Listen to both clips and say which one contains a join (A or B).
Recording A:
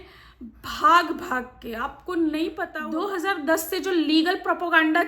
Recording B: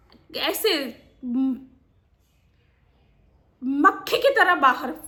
A